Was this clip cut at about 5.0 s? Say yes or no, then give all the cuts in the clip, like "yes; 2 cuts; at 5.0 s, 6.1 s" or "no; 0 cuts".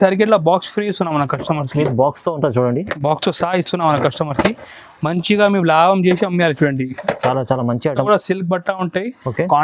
no; 1 cut; at 8.0 s